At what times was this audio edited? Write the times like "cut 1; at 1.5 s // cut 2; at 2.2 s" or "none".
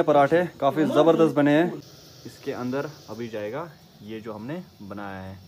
cut 1; at 1.6 s